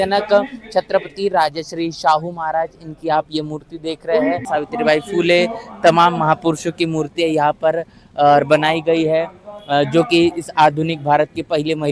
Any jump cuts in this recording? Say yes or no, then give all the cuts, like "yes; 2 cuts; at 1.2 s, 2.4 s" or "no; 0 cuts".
yes; 1 cut; at 4.4 s